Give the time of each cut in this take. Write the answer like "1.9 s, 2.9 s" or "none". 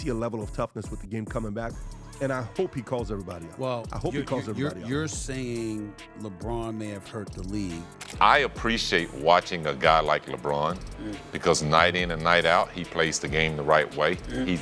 8.0 s